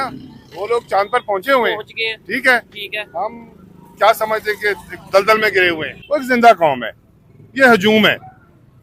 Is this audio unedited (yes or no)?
no